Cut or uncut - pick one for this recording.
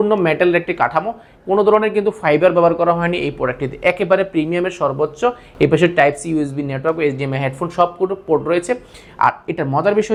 uncut